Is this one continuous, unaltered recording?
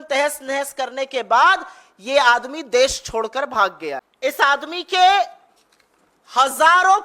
no; 1 cut; at 4.1 s

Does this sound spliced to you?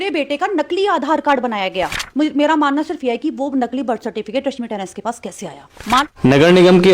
yes; 2 cuts; at 2.0 s, 6.0 s

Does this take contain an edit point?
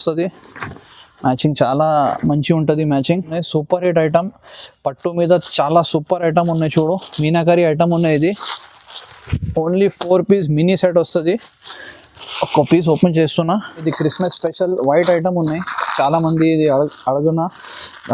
yes; 2 cuts; at 3.4 s, 13.8 s

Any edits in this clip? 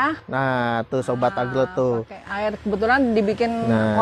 no; 0 cuts

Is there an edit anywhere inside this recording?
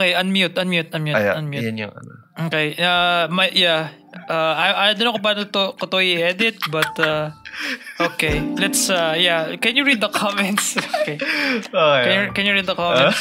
no; 0 cuts

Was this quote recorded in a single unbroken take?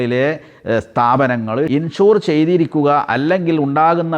no; 1 cut; at 1.7 s

